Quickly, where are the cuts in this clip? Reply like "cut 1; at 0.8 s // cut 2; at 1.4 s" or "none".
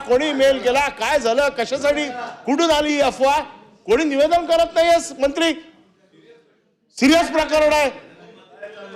none